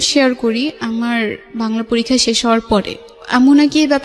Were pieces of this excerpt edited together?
no; 0 cuts

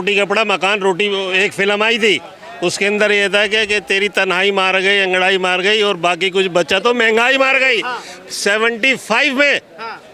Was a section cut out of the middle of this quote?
no; 0 cuts

